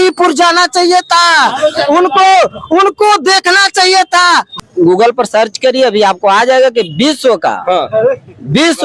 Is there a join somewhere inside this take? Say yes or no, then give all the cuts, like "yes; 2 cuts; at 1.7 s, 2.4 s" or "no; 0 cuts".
yes; 1 cut; at 4.5 s